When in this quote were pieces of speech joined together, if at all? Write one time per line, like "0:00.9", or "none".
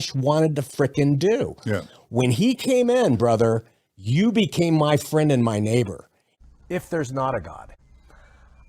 0:06.5